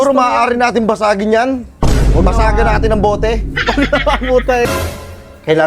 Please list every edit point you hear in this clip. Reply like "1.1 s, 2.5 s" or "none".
4.6 s